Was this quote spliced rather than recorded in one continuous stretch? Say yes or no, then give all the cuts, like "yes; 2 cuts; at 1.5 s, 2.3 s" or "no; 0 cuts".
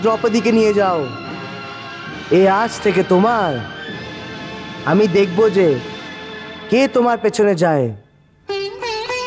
no; 0 cuts